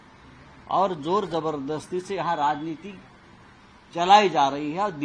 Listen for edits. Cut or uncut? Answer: uncut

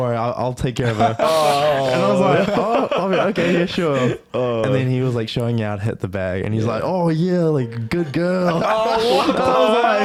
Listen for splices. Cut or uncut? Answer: uncut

